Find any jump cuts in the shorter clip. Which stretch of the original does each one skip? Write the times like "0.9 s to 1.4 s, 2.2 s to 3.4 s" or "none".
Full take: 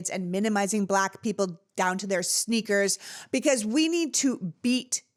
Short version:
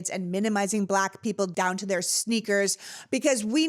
1.5 s to 1.7 s